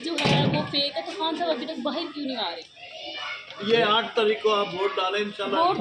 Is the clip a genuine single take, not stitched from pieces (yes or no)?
yes